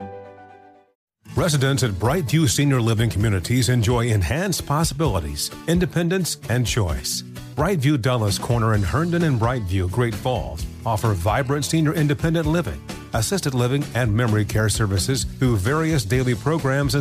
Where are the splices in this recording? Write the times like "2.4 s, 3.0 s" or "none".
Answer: 1.0 s